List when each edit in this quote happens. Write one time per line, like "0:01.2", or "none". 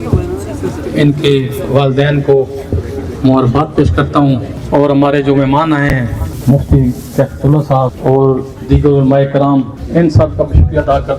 0:04.5
0:06.3
0:08.0
0:09.8